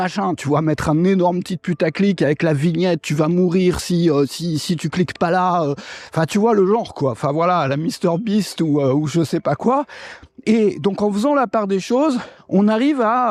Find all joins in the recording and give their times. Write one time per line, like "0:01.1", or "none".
none